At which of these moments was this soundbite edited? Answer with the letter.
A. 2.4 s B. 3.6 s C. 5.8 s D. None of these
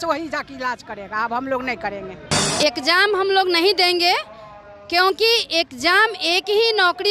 A